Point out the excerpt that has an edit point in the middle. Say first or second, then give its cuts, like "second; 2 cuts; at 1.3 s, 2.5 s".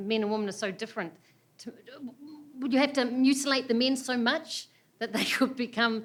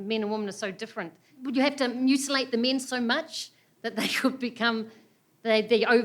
second; 1 cut; at 1.2 s